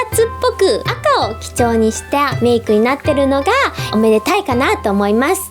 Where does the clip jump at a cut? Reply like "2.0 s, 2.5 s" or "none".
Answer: 0.9 s, 2.3 s, 3.9 s